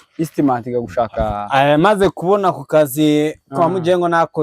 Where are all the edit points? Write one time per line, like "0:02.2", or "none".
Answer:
none